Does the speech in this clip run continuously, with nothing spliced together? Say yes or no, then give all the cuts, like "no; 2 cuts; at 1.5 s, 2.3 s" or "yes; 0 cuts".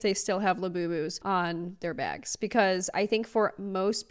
no; 1 cut; at 1.2 s